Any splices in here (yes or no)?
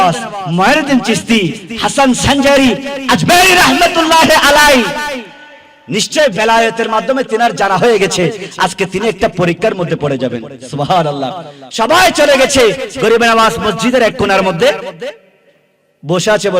no